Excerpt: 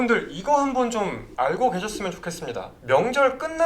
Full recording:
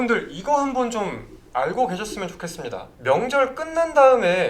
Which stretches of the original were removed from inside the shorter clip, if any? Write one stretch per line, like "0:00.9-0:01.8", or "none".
0:01.2-0:01.4